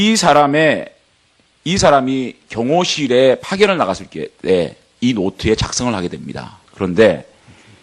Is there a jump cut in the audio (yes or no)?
yes